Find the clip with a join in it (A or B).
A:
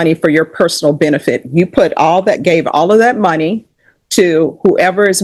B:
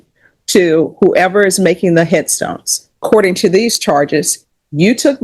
B